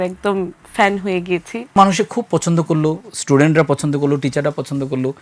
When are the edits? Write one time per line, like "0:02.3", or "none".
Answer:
0:01.8